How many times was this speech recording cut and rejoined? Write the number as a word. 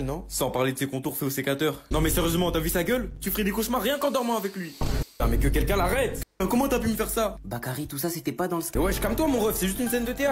two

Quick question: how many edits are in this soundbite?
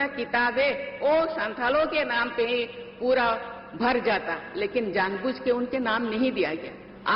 zero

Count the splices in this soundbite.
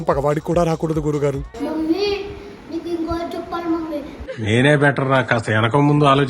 one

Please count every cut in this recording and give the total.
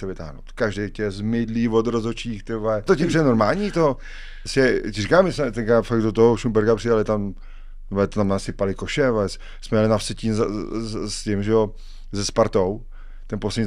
one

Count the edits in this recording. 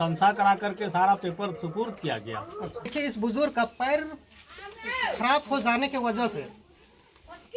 one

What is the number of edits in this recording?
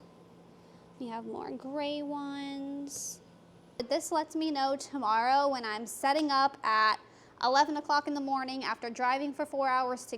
one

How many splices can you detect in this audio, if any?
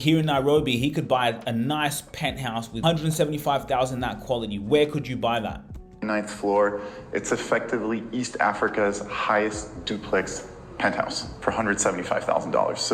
one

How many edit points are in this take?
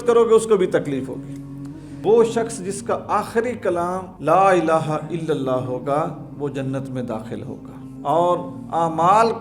two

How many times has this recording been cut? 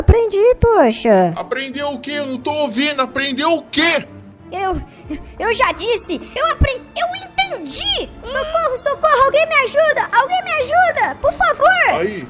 two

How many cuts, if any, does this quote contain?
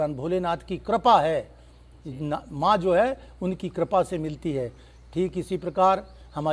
zero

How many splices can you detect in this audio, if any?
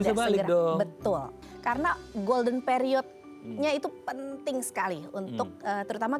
one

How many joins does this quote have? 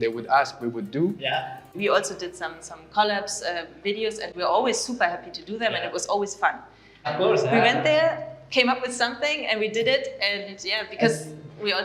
two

